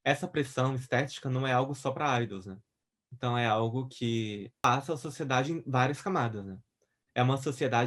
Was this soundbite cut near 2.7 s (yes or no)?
no